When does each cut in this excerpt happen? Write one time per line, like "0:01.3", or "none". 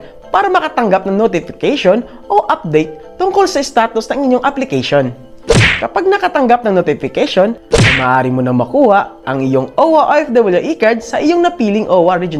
none